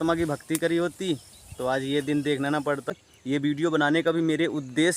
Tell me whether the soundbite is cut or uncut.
cut